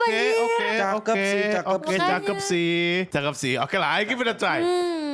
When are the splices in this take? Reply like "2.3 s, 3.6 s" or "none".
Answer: 3.1 s